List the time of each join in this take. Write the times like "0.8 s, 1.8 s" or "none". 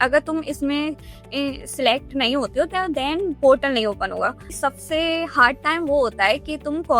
4.5 s